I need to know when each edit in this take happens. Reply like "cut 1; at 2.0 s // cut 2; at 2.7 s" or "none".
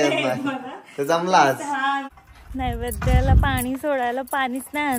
cut 1; at 2.2 s